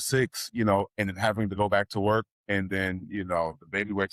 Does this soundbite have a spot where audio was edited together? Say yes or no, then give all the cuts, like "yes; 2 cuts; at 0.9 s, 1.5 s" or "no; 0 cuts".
no; 0 cuts